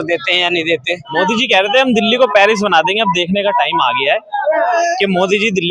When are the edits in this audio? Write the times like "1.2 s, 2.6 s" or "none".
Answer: 1.1 s